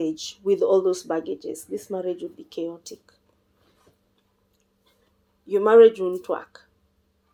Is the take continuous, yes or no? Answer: yes